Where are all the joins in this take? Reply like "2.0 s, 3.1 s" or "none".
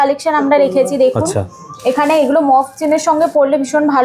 none